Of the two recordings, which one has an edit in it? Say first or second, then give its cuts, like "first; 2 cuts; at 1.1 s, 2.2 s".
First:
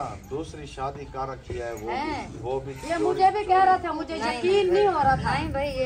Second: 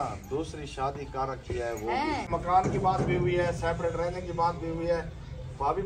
second; 1 cut; at 2.3 s